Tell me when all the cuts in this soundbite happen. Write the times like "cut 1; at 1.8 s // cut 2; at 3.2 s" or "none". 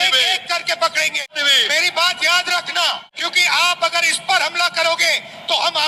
cut 1; at 1.3 s // cut 2; at 3.2 s